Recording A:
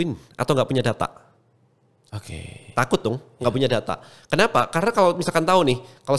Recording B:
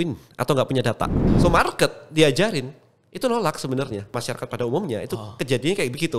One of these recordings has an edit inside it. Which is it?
B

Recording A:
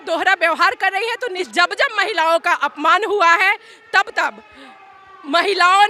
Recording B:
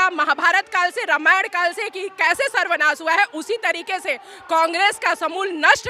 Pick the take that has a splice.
A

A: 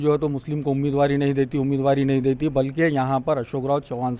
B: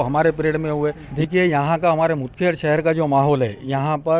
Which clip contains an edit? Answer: B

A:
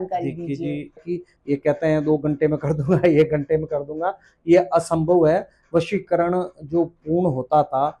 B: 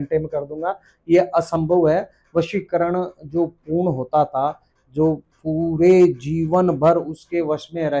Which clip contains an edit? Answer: A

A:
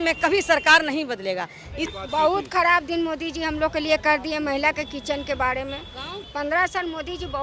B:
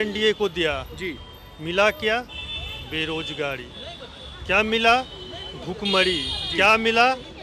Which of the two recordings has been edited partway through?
A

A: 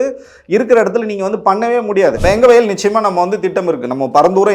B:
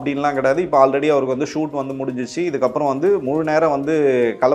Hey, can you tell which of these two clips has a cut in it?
A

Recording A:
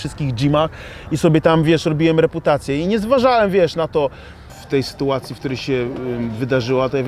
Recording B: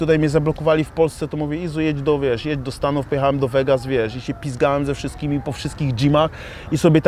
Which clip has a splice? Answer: A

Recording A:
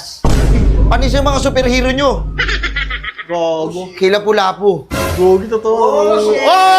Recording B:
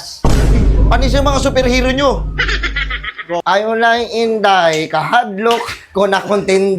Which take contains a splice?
B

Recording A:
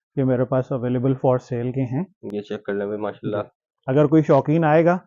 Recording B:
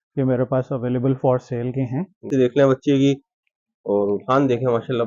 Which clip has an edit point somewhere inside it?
B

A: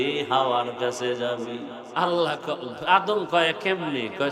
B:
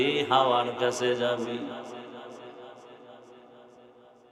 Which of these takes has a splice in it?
A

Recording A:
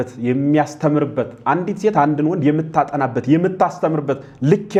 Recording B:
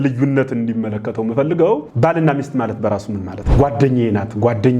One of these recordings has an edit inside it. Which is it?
B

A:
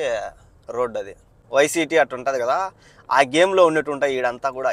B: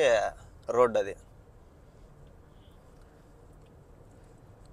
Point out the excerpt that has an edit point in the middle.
A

